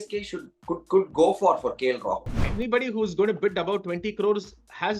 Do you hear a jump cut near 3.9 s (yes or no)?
no